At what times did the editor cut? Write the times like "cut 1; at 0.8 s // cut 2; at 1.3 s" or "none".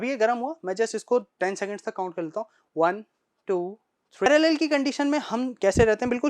cut 1; at 4.3 s